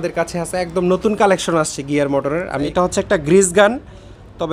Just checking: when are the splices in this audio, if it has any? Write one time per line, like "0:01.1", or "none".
0:02.7